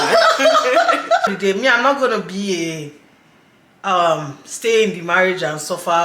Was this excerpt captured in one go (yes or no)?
no